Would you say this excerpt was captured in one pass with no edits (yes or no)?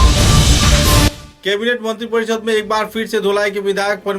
no